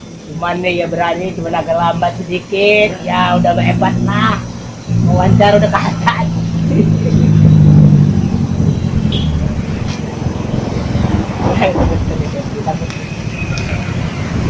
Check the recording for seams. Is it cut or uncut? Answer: uncut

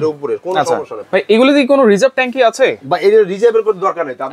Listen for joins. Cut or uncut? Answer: cut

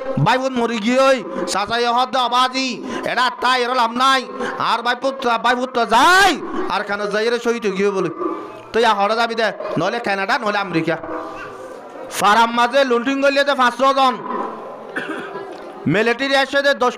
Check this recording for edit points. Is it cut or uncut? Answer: cut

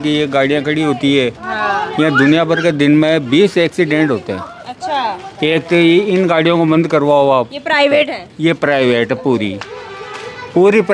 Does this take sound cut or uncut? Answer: uncut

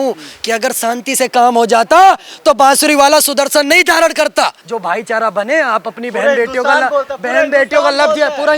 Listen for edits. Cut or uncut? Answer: cut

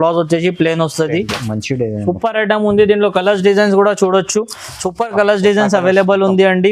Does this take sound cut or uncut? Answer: cut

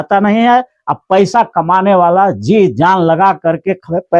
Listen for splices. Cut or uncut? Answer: uncut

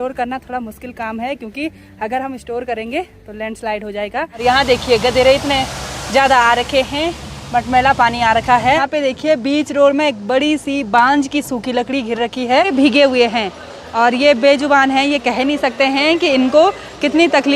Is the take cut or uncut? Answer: cut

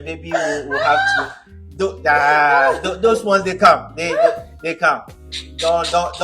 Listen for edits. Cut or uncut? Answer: uncut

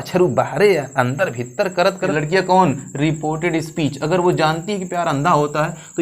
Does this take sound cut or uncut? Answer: cut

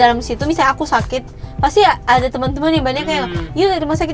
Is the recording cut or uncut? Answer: uncut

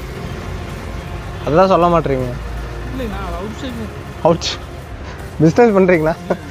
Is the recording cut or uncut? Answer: uncut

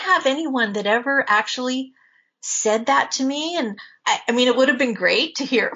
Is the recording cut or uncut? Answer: cut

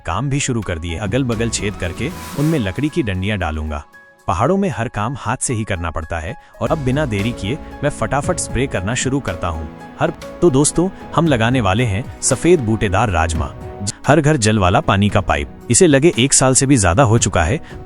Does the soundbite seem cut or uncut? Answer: cut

